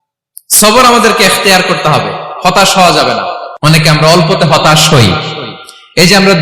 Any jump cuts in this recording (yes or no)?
yes